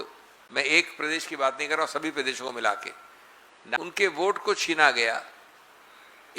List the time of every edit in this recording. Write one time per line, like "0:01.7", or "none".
0:03.8